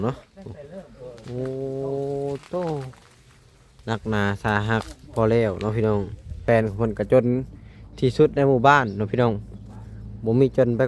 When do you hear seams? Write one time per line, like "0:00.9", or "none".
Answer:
0:06.4